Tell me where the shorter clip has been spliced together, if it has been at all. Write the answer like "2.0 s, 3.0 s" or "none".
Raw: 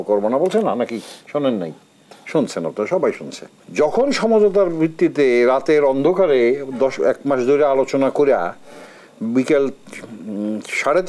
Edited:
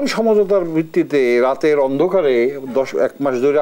none